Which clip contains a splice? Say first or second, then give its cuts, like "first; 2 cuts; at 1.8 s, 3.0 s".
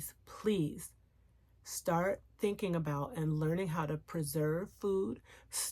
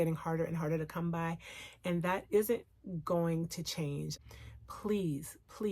second; 1 cut; at 4.1 s